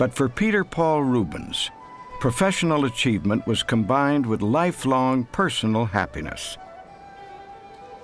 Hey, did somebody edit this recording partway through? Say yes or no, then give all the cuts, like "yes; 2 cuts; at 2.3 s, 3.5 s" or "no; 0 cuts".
no; 0 cuts